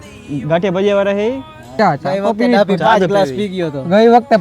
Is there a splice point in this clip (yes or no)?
yes